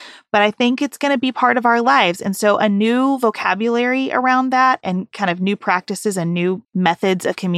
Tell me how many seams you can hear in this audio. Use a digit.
1